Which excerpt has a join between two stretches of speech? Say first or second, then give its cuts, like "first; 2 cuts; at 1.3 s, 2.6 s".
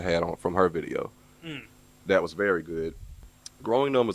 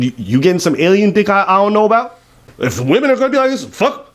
first; 1 cut; at 2.9 s